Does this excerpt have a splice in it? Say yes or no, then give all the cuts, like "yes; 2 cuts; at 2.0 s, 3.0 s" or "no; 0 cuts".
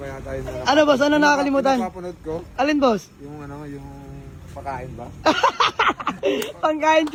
no; 0 cuts